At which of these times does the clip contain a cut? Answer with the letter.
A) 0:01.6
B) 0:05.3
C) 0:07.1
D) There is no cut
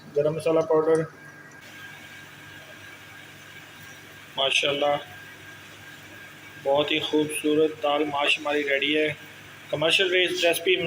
A